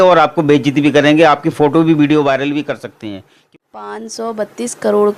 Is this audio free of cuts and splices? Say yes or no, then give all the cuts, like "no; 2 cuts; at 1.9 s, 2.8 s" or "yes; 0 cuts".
no; 1 cut; at 3.4 s